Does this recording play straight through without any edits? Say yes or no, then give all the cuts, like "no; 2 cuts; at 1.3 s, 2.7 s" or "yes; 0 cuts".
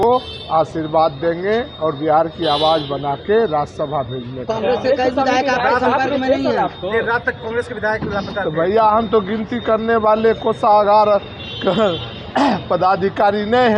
yes; 0 cuts